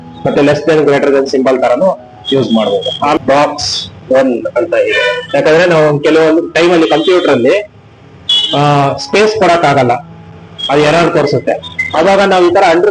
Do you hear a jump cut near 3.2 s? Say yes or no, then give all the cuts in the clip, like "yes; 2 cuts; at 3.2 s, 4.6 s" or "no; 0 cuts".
yes; 1 cut; at 3.2 s